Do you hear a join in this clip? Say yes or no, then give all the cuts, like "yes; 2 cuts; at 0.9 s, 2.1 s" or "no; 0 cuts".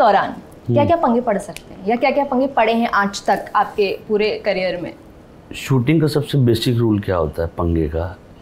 no; 0 cuts